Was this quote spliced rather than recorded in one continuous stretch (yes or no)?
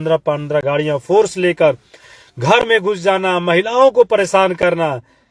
no